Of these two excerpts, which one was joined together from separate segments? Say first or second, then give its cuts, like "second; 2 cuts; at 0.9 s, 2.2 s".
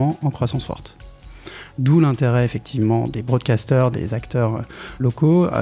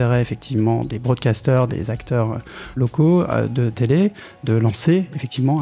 first; 1 cut; at 1.3 s